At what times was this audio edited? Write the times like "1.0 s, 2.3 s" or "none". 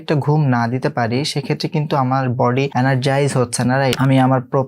2.7 s, 4.0 s